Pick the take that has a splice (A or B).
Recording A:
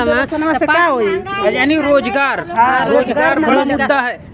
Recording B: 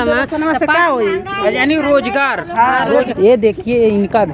B